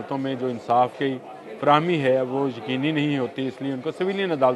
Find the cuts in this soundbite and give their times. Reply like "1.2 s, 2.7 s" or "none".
none